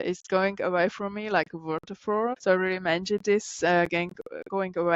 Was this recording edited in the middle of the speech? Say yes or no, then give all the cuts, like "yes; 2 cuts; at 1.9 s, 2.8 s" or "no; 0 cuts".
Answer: yes; 1 cut; at 2.4 s